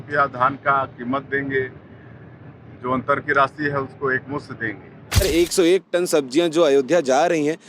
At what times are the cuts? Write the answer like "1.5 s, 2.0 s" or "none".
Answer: 5.2 s